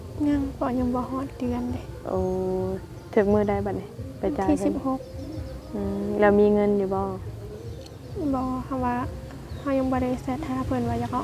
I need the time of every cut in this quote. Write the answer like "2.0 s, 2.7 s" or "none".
none